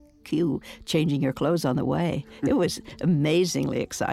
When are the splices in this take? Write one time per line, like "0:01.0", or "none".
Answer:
none